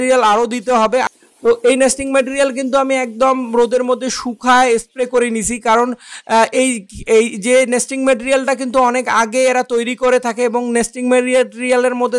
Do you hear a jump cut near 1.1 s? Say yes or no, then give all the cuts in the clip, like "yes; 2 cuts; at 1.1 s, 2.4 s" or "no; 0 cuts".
yes; 1 cut; at 1.1 s